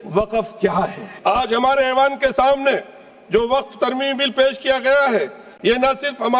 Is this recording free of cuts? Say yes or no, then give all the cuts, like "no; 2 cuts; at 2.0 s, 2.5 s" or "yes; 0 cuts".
no; 1 cut; at 1.1 s